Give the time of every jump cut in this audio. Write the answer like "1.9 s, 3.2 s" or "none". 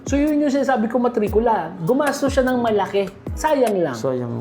3.2 s